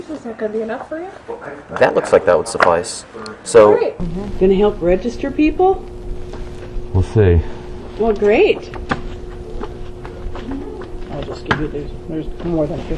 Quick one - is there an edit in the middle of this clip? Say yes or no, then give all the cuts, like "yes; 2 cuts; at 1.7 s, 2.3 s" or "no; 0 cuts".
no; 0 cuts